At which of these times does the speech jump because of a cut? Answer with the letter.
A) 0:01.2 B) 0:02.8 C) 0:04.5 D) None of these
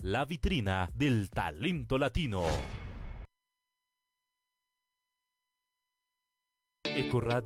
D